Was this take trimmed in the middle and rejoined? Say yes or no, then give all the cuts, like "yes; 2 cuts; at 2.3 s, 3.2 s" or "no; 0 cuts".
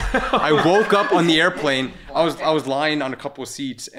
no; 0 cuts